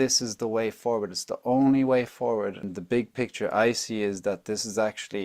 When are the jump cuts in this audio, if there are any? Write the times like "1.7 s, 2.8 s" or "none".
2.6 s